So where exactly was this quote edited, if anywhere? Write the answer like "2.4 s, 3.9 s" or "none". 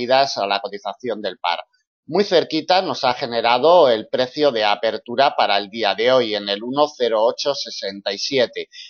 none